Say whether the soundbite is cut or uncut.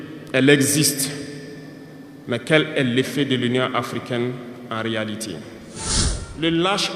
cut